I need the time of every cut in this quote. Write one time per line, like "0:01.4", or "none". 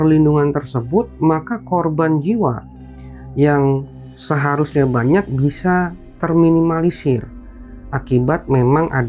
none